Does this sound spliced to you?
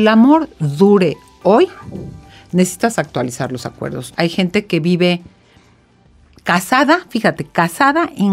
yes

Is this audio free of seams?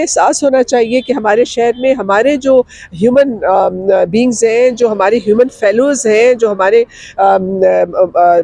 yes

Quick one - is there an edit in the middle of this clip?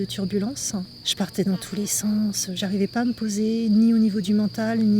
yes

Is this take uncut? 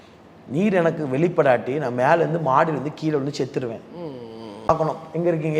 no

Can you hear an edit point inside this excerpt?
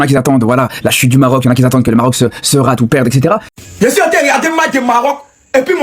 yes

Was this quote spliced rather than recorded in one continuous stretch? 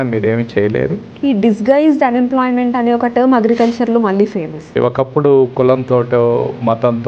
yes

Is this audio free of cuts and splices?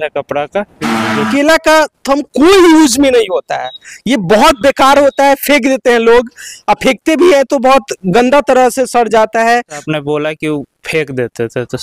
no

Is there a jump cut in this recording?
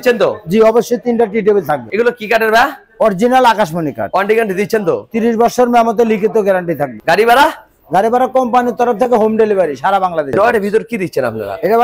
yes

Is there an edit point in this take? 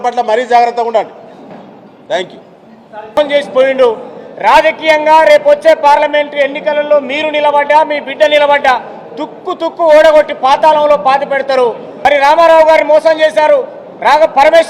yes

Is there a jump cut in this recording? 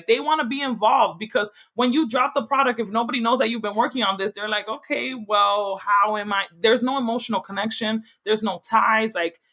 no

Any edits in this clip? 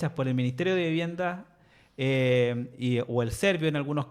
no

